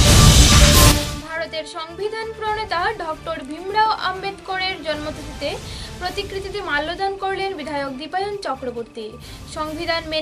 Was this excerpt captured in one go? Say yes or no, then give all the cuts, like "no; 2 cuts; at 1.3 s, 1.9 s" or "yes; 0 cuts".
no; 1 cut; at 1.1 s